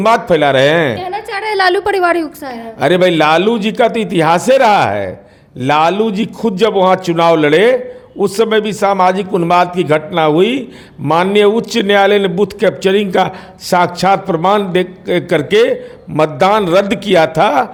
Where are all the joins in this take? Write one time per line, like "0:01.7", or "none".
none